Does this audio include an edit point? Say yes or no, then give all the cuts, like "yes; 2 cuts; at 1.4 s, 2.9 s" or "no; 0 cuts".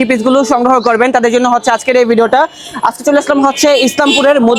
no; 0 cuts